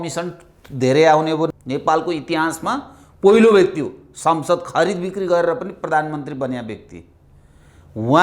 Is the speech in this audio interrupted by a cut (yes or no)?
yes